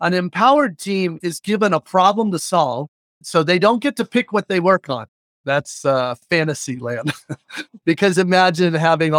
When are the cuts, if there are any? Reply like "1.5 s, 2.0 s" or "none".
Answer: none